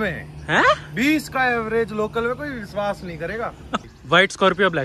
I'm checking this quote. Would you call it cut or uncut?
cut